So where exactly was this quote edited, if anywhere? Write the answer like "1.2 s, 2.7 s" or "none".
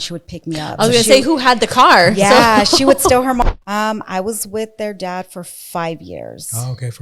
3.4 s